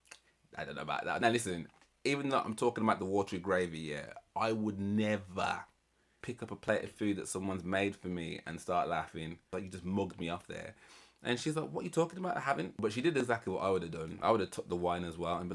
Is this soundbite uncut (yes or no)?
no